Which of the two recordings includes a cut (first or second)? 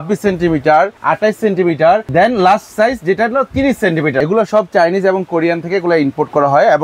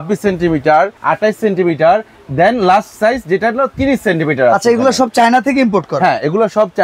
first